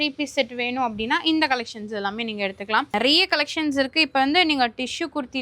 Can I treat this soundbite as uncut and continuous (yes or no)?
no